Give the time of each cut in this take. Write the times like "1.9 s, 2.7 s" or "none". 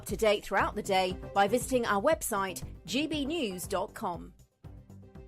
4.4 s